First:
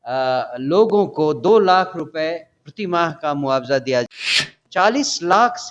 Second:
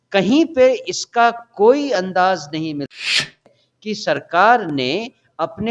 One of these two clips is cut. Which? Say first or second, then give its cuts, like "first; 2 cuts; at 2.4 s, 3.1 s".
first; 1 cut; at 4.1 s